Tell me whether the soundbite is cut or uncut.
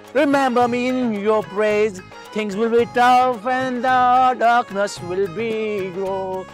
uncut